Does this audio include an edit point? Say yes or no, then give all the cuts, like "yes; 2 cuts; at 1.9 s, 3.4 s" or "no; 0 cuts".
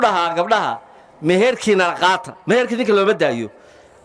no; 0 cuts